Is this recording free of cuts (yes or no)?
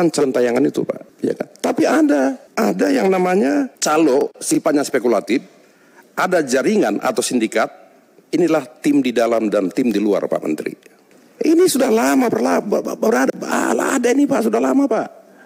yes